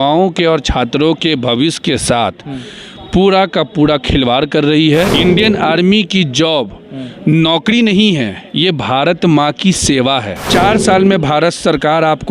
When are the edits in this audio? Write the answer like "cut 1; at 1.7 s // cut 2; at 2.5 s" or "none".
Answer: cut 1; at 5.1 s // cut 2; at 10.4 s